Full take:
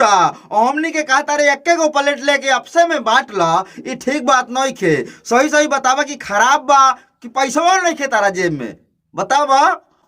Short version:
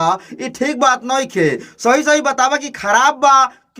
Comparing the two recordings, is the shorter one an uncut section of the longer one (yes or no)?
yes